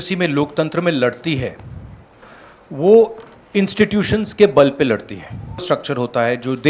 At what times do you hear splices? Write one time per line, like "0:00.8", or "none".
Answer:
0:05.6